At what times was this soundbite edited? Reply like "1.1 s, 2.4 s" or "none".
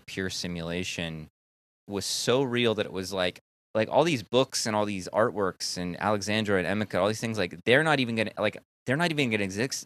1.8 s, 3.4 s